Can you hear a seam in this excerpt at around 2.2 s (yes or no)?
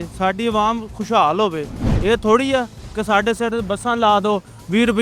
no